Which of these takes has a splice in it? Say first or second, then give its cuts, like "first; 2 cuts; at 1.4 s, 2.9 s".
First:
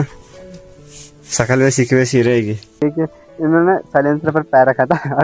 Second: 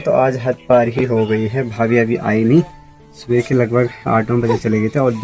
first; 1 cut; at 2.8 s